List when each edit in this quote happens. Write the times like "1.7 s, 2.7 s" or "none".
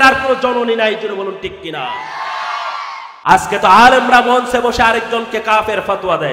3.1 s